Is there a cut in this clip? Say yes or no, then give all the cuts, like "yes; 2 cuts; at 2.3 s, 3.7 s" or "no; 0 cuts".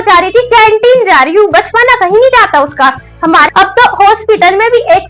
yes; 1 cut; at 3.5 s